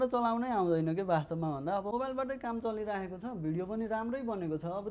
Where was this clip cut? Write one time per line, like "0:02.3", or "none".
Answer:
0:01.9